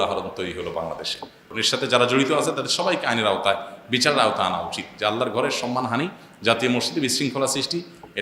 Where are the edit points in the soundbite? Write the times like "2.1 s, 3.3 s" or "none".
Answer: 1.4 s